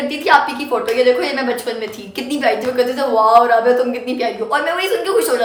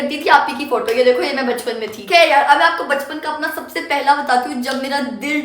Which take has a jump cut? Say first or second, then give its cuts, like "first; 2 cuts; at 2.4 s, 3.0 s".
second; 1 cut; at 1.9 s